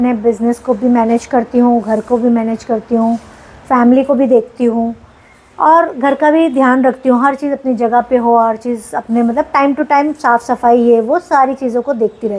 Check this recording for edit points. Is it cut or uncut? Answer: uncut